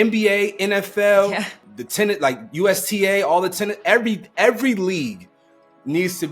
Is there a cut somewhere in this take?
yes; 1 cut; at 1.6 s

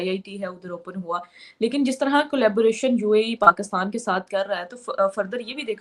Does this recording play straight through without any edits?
yes; 0 cuts

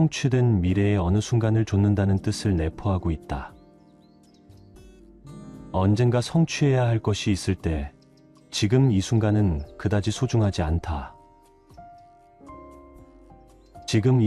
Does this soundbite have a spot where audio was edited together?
no; 0 cuts

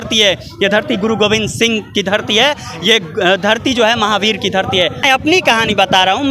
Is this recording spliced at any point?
yes; 1 cut; at 5.0 s

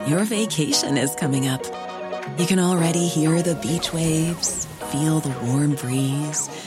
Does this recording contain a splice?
no; 0 cuts

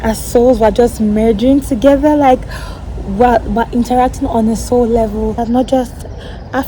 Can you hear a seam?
yes; 1 cut; at 5.4 s

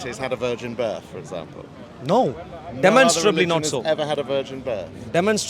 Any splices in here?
no; 0 cuts

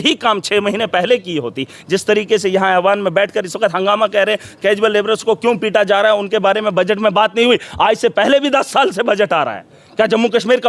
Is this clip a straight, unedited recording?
yes; 0 cuts

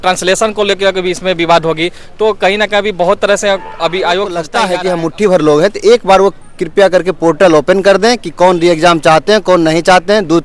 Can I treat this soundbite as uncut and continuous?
no; 1 cut; at 4.5 s

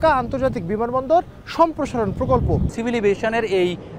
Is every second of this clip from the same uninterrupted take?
no; 1 cut; at 2.7 s

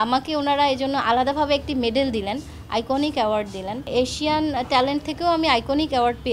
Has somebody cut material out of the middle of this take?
yes; 1 cut; at 3.8 s

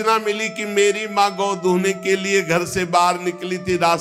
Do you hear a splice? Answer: no; 0 cuts

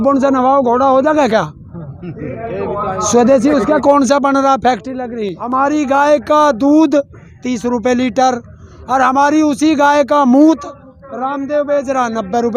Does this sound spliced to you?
yes; 1 cut; at 5.4 s

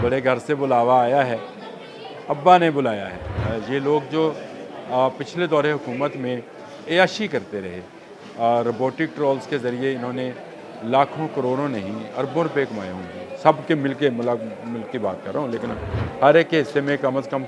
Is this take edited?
yes; 1 cut; at 3.3 s

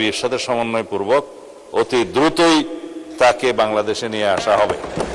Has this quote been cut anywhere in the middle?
no; 0 cuts

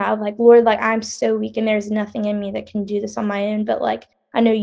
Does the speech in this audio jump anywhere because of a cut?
no; 0 cuts

